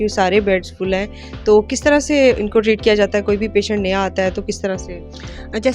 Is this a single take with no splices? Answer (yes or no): yes